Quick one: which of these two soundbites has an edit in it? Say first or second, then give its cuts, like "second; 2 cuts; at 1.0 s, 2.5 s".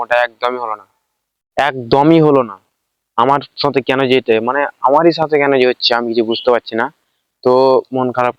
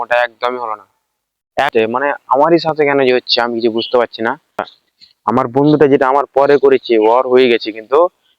second; 2 cuts; at 1.7 s, 4.7 s